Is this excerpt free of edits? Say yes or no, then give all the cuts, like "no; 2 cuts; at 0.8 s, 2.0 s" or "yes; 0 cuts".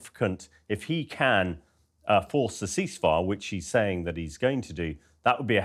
yes; 0 cuts